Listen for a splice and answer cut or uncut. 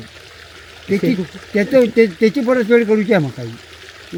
uncut